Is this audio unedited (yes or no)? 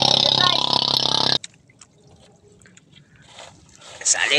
no